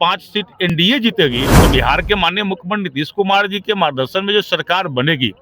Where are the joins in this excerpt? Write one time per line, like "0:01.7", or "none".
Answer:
0:01.6